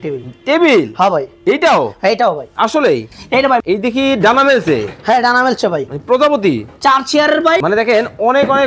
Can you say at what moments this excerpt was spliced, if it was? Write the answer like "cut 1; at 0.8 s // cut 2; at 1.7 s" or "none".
cut 1; at 3.6 s // cut 2; at 7.6 s